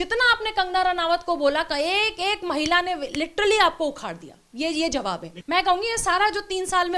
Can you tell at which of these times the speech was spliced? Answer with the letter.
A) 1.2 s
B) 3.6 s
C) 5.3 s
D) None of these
C